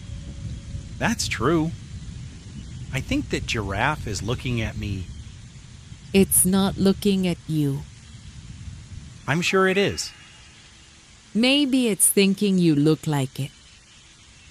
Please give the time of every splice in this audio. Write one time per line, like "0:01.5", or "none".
0:01.0